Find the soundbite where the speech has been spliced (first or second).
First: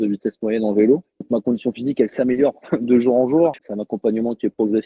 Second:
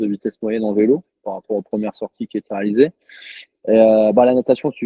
first